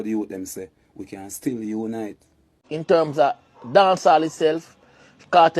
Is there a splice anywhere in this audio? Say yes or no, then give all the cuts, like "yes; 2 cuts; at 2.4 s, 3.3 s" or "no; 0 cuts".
yes; 1 cut; at 2.7 s